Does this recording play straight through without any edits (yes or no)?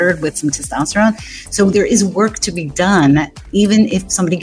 yes